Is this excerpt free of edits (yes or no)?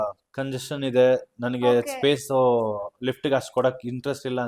yes